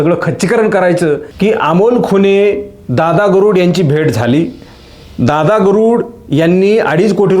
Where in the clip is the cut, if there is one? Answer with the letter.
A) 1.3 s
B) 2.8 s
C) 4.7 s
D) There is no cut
A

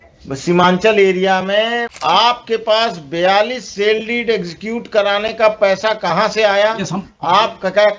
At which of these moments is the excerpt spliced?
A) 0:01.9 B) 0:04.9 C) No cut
A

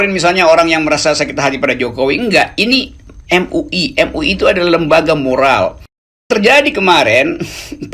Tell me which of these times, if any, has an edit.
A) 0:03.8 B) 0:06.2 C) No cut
B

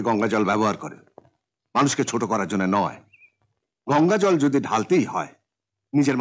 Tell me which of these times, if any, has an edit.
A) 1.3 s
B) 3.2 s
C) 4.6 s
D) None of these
D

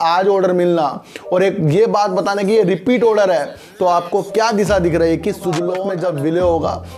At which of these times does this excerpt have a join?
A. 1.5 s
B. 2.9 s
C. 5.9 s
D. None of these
C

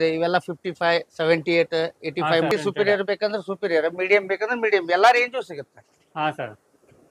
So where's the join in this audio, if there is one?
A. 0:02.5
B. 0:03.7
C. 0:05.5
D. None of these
A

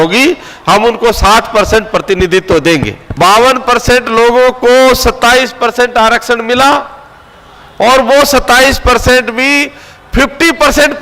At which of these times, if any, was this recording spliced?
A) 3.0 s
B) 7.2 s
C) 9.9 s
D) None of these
A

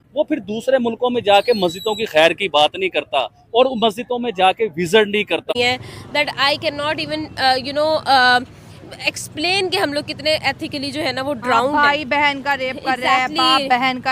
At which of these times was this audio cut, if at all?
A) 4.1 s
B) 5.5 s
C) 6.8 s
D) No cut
B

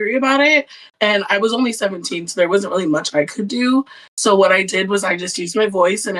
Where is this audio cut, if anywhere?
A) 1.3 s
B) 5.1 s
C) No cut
C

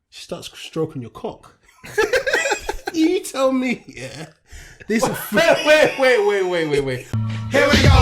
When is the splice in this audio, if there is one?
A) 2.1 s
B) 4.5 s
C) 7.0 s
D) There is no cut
C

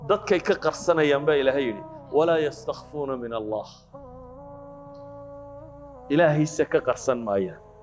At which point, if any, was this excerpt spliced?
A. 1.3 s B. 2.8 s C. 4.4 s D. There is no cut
D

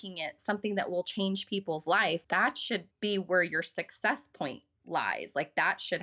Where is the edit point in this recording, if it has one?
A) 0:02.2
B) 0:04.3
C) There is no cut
A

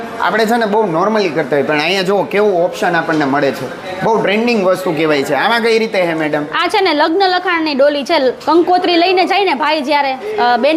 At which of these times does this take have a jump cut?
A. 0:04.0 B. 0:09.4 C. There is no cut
C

